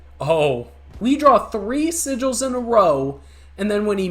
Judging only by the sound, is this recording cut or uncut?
cut